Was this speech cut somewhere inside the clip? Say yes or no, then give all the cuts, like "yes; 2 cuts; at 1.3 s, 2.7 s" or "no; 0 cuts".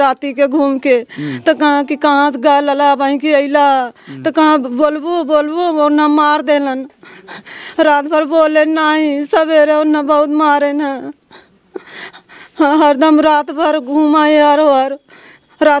no; 0 cuts